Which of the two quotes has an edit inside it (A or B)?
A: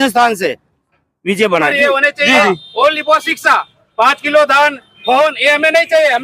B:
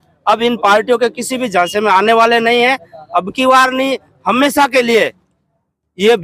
A